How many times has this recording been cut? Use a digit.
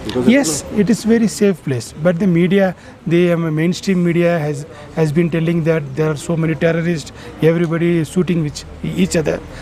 0